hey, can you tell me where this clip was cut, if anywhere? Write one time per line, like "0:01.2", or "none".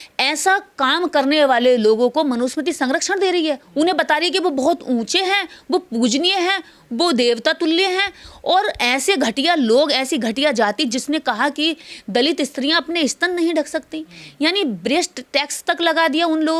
none